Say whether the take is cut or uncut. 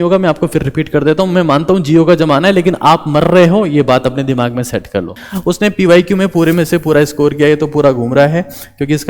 cut